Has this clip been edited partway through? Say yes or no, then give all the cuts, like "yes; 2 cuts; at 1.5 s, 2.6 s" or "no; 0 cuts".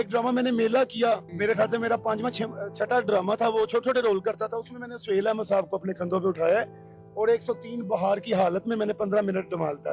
yes; 1 cut; at 1.3 s